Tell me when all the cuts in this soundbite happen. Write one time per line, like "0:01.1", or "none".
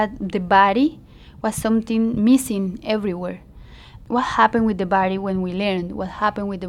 0:04.0

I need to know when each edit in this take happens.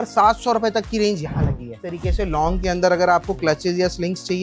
0:01.9

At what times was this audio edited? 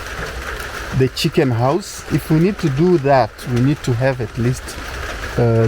0:02.0

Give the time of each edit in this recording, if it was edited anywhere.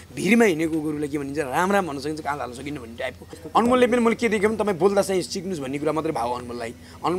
0:03.3

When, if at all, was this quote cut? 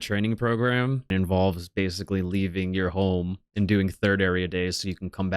0:01.1

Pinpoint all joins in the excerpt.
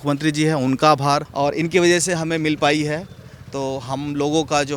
0:01.3

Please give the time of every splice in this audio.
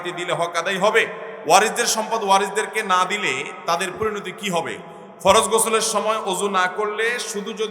0:01.3
0:04.8

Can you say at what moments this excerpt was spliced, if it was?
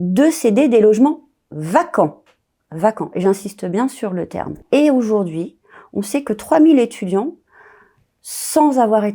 0:04.6

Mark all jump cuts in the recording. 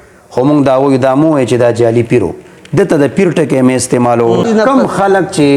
0:04.5

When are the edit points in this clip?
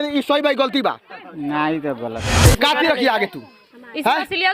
0:02.4

